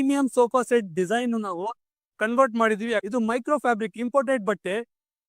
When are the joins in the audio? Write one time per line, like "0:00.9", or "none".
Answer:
0:03.0